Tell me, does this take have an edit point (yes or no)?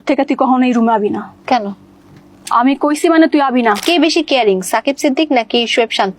yes